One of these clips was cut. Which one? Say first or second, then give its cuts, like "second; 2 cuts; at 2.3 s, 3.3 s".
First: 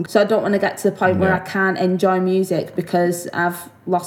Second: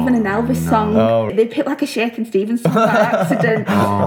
second; 1 cut; at 1.3 s